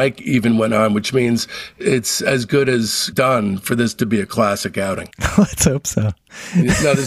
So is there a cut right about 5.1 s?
no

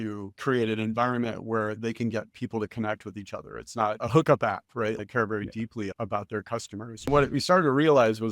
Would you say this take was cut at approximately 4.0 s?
yes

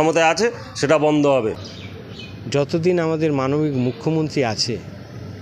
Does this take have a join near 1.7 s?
yes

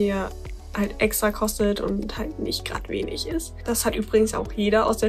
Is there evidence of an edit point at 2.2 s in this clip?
no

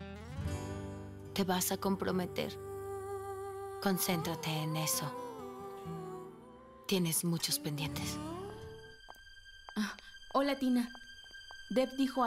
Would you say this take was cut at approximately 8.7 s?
yes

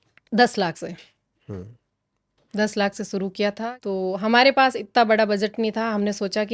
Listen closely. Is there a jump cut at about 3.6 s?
yes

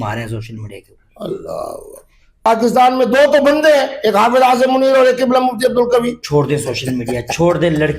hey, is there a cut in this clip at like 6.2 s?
yes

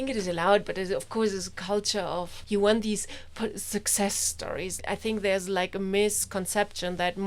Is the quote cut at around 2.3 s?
yes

